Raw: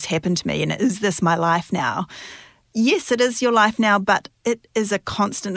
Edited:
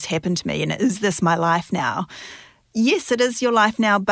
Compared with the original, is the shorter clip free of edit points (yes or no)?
yes